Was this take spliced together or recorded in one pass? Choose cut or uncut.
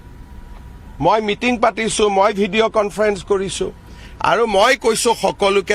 uncut